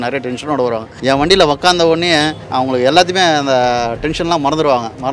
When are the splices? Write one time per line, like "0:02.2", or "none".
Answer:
0:00.9
0:02.4